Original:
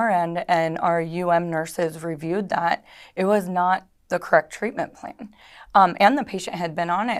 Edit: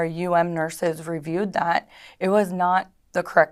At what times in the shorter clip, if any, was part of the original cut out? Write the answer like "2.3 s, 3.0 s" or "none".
none